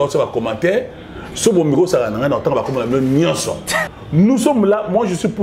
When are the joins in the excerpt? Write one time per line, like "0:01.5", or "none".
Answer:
0:03.9